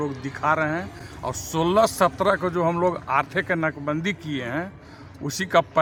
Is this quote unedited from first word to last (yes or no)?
yes